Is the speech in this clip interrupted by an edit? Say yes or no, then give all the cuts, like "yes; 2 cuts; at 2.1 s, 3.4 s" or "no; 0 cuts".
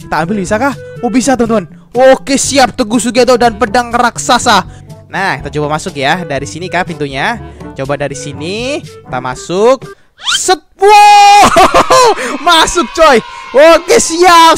yes; 2 cuts; at 4.8 s, 13.3 s